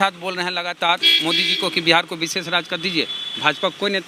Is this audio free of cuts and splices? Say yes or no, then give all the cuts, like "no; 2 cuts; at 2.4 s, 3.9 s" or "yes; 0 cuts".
yes; 0 cuts